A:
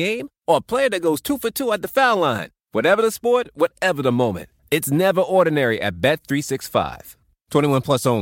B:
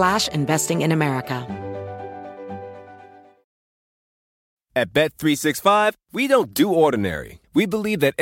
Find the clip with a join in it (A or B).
B